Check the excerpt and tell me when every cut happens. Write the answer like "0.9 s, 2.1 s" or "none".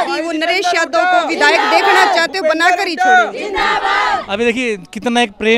none